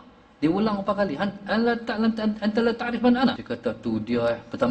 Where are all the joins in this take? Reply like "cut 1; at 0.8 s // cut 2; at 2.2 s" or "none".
cut 1; at 3.4 s